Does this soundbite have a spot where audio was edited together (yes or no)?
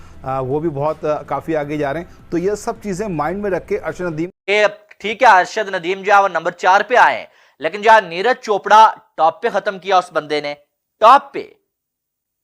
yes